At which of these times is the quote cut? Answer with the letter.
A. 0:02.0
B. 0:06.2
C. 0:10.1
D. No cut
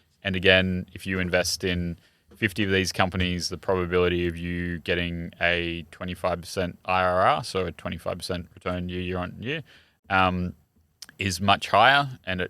D